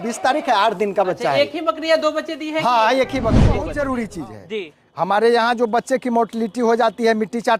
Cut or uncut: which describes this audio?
cut